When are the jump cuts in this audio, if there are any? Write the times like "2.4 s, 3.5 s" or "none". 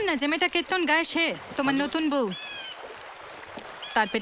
1.4 s